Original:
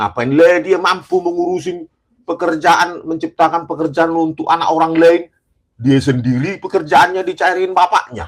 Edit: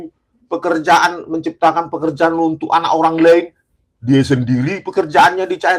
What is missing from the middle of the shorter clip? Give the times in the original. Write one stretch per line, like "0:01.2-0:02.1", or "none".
none